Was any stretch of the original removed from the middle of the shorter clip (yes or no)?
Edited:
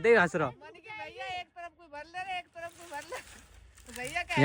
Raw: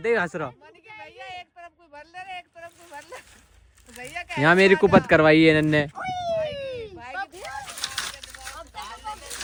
no